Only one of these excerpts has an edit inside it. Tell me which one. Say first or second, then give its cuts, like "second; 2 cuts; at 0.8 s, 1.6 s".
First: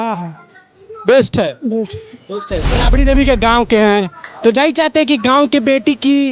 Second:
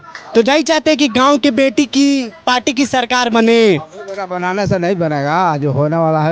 first; 1 cut; at 2.8 s